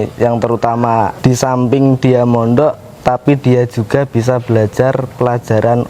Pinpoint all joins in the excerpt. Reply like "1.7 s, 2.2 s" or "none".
1.1 s